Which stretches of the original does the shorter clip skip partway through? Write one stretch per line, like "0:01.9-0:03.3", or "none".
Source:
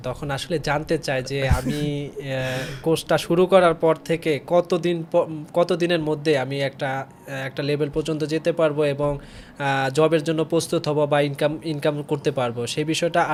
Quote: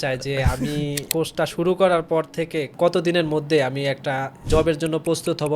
0:02.1-0:02.7
0:04.4-0:05.4
0:07.2-0:09.9

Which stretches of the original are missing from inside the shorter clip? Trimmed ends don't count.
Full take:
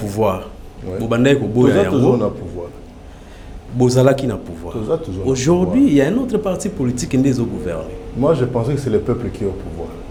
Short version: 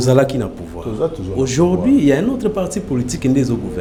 none

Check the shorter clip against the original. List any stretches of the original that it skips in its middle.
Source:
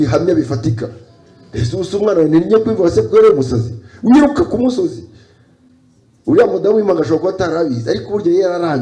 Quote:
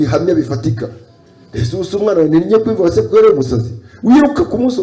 none

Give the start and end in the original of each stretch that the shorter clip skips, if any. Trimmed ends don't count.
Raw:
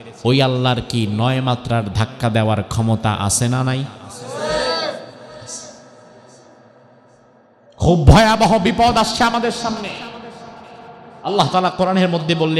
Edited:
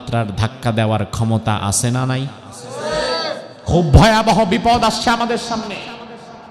0:05.1-0:07.7

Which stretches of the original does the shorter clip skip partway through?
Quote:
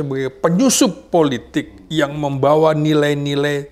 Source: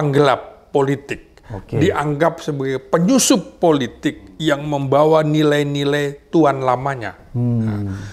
none

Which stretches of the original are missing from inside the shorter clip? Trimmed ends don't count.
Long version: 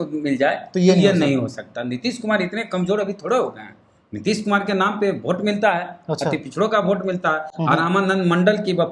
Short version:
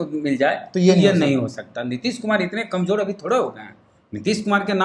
none

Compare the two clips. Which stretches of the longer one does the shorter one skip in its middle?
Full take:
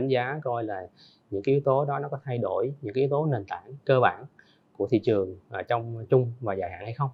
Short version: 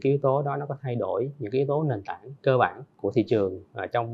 0:04.3-0:04.6

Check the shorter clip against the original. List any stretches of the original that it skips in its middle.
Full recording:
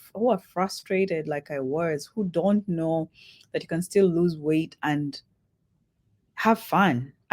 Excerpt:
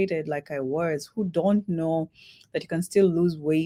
none

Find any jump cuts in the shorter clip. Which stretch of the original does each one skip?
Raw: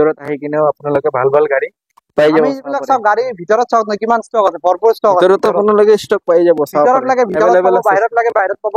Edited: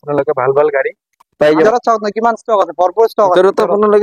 0:02.4-0:03.5

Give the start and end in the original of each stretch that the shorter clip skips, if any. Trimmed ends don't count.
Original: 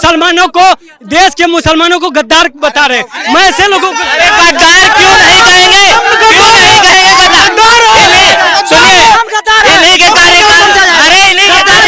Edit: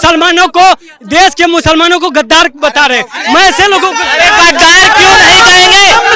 none

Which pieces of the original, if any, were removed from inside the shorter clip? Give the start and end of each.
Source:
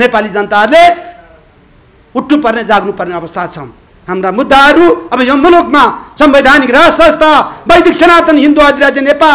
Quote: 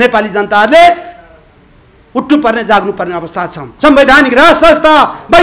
0:03.7-0:06.0

